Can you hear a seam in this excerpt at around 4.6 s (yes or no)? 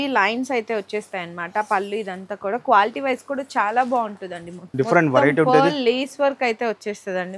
yes